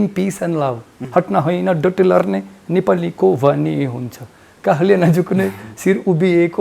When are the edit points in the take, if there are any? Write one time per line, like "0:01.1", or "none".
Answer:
0:00.9

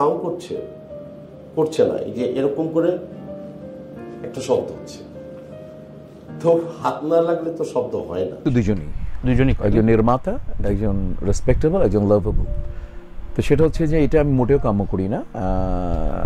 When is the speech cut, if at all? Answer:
none

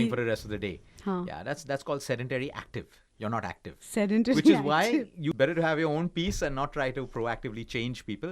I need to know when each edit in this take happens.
0:05.3

